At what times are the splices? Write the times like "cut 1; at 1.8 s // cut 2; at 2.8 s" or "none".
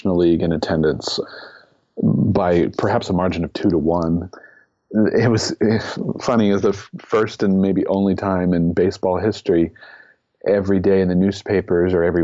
cut 1; at 1.2 s // cut 2; at 4.4 s